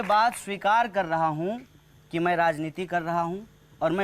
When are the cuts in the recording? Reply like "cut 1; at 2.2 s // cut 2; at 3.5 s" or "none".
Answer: none

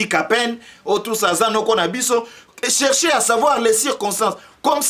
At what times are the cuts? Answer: none

